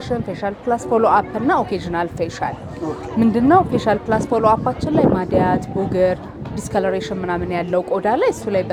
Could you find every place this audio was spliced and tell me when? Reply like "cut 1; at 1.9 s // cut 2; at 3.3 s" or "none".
none